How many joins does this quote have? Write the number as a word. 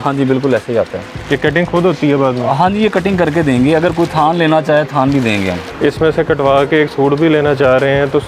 one